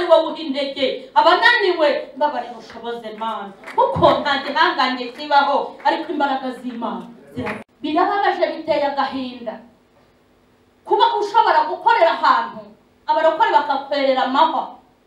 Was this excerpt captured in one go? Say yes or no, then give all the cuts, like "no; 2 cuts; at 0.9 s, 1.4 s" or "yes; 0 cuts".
no; 1 cut; at 7.6 s